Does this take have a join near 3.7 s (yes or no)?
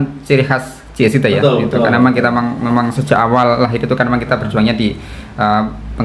no